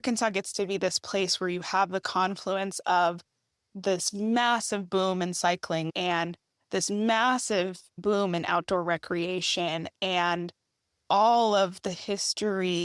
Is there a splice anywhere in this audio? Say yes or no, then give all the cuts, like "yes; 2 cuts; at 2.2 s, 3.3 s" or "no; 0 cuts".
yes; 1 cut; at 5.9 s